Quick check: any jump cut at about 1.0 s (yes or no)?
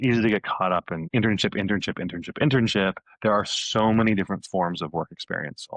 yes